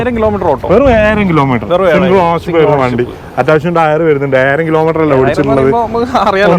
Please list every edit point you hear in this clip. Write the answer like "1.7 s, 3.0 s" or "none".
none